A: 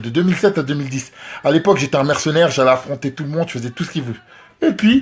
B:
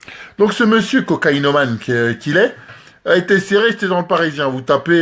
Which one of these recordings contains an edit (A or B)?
B